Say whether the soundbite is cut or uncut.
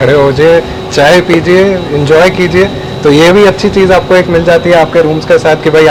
uncut